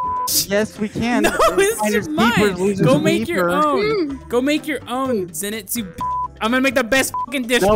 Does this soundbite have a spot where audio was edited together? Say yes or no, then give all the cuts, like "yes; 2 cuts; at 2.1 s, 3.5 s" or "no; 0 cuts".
yes; 1 cut; at 6.4 s